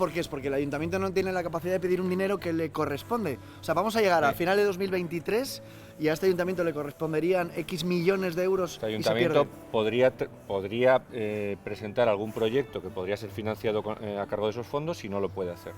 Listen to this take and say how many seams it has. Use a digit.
0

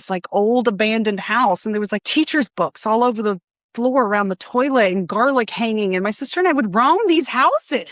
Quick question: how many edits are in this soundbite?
1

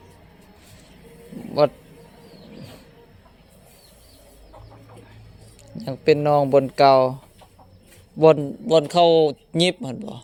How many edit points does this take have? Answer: 0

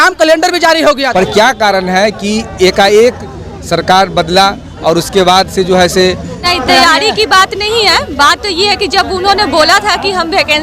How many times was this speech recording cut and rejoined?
2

